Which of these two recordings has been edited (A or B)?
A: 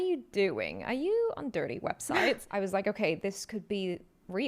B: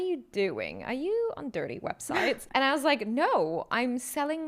A